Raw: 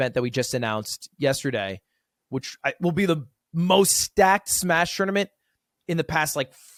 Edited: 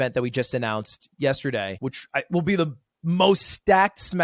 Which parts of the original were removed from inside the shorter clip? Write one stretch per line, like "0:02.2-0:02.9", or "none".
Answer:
0:01.7-0:02.2